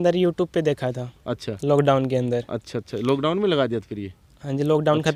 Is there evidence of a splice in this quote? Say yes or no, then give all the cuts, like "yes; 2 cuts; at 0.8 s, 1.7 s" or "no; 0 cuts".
no; 0 cuts